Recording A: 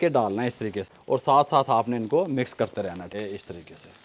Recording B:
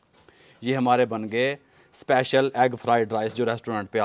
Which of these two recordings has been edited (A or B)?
A